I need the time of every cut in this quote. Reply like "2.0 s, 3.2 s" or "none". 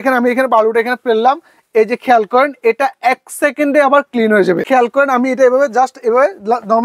4.6 s